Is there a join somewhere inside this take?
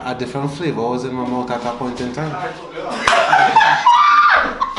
no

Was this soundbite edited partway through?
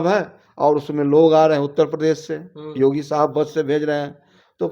no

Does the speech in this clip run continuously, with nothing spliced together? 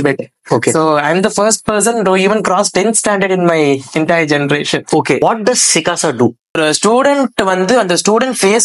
no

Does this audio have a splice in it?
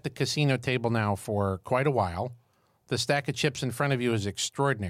no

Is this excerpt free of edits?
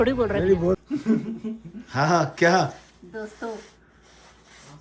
no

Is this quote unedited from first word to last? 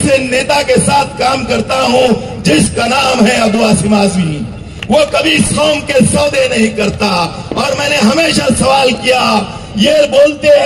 yes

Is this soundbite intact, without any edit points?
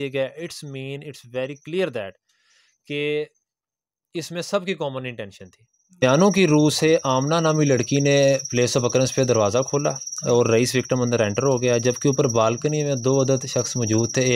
no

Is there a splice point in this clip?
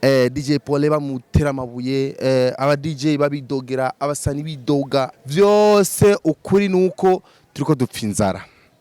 yes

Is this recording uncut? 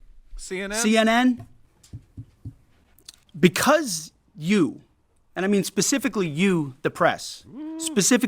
no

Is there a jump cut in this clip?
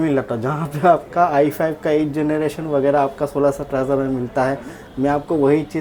no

